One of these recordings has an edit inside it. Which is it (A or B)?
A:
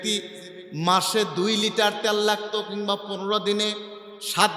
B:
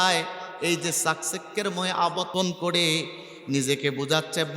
B